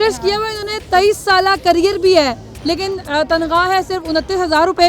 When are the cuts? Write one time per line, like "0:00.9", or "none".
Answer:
none